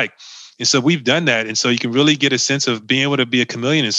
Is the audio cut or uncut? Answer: cut